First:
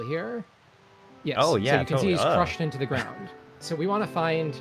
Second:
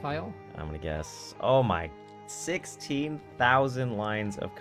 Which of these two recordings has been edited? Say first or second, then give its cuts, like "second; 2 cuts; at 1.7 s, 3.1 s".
first; 1 cut; at 3.6 s